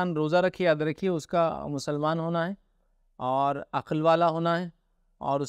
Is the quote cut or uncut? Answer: uncut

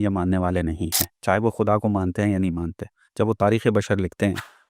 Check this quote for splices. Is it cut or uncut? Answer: uncut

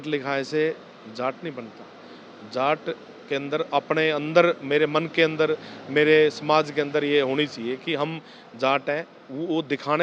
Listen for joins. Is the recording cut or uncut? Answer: uncut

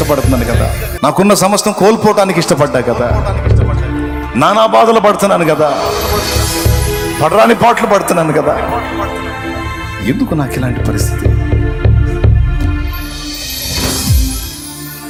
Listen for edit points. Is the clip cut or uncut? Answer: uncut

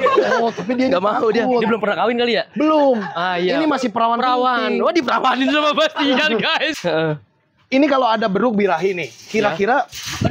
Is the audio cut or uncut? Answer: cut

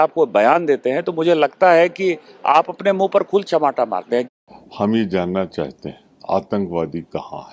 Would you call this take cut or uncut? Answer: cut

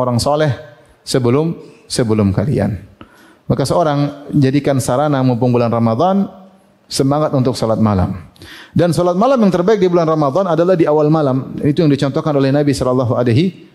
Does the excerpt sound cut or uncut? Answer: uncut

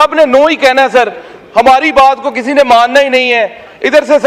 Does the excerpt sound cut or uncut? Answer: uncut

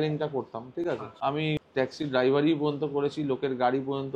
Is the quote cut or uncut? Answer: cut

